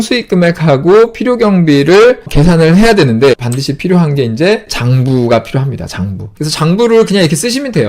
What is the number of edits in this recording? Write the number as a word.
two